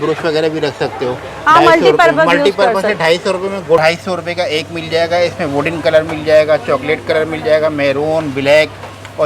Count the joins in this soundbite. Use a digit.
1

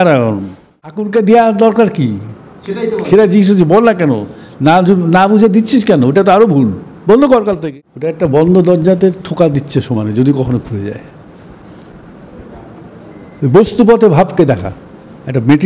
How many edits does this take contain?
2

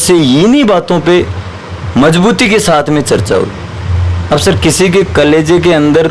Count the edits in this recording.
0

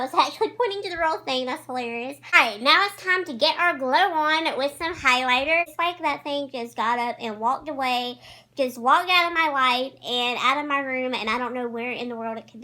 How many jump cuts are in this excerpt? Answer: 2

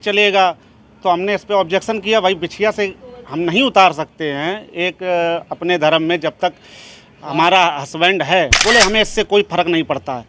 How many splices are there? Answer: 1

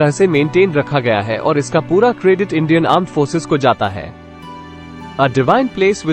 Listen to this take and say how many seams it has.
0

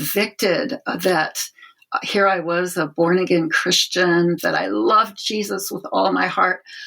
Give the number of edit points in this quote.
1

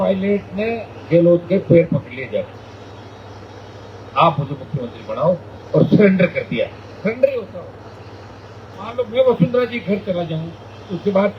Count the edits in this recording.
0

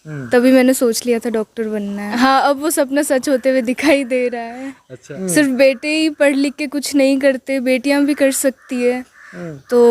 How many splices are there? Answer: 2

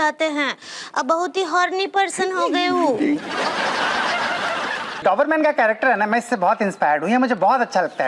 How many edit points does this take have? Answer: 1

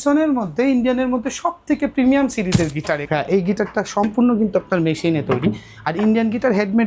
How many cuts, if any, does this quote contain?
1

